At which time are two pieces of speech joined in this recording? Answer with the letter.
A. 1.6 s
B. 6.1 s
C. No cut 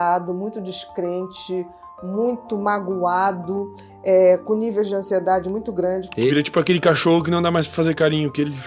B